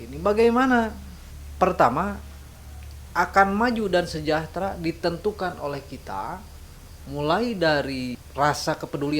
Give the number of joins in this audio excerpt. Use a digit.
0